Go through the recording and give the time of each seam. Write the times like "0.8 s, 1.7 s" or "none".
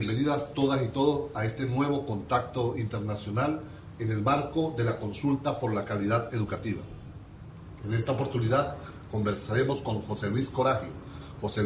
none